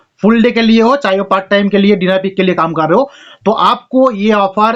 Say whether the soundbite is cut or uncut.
uncut